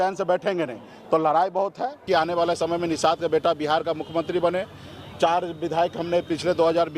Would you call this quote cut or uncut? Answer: cut